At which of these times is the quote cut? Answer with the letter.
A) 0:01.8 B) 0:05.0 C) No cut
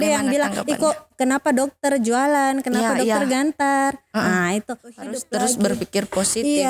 B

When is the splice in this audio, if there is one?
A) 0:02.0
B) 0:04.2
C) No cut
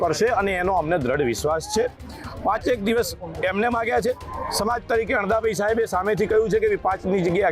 C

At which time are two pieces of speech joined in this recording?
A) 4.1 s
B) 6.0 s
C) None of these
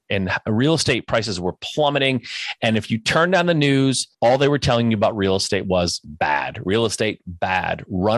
A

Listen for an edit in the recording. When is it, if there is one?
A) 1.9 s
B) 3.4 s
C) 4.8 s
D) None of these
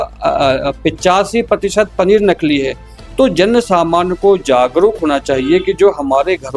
D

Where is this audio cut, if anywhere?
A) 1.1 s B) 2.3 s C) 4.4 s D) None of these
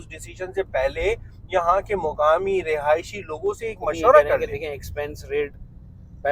C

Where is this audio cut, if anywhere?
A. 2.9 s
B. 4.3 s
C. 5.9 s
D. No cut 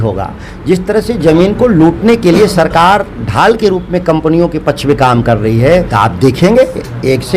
C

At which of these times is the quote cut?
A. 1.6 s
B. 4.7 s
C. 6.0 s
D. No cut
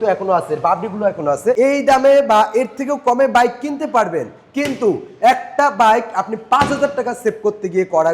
A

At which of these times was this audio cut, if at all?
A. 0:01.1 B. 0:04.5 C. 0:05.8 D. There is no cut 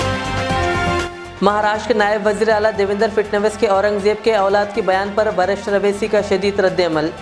A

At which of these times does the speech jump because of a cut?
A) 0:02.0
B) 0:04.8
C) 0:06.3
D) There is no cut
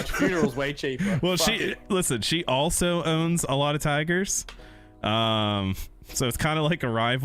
D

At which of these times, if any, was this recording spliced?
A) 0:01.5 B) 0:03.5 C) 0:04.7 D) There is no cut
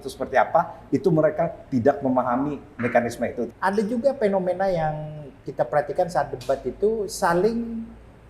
B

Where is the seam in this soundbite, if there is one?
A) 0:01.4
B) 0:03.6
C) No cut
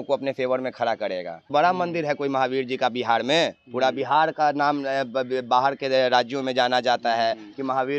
A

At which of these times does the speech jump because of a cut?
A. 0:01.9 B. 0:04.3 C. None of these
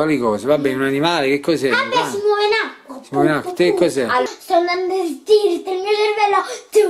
B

